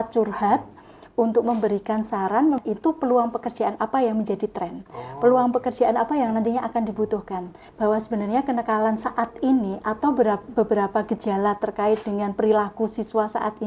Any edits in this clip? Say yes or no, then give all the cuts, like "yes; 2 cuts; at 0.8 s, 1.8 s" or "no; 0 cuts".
yes; 2 cuts; at 2.6 s, 7.6 s